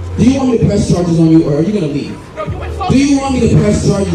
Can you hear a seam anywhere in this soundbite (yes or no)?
no